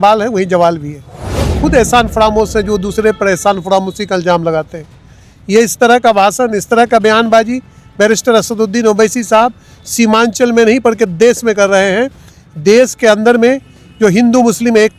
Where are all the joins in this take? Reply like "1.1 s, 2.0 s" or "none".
1.5 s